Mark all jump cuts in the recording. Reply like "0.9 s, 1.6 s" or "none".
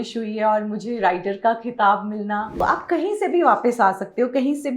2.6 s